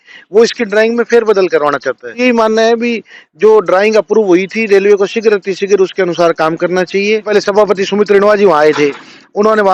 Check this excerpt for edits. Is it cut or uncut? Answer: cut